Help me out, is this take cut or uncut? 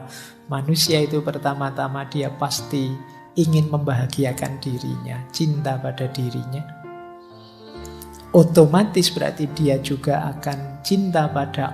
cut